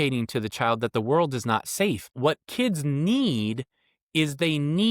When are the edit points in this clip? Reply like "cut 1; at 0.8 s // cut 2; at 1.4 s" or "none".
cut 1; at 2.1 s

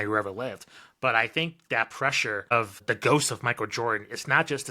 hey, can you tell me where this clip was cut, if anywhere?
cut 1; at 2.8 s

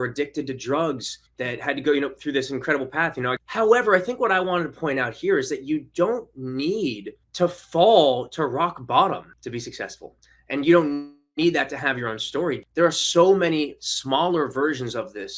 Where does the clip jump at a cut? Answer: cut 1; at 3.4 s // cut 2; at 9.3 s // cut 3; at 12.6 s

